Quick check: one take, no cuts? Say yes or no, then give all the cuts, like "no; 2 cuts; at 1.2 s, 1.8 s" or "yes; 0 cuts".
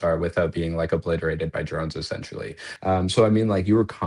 no; 1 cut; at 2.6 s